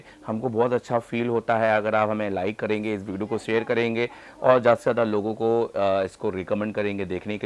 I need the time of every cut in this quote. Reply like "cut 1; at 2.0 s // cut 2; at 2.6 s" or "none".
none